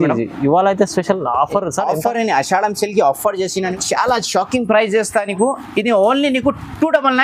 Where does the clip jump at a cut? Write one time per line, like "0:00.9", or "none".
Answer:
0:03.8